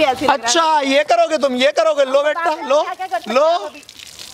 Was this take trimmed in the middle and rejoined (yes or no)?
no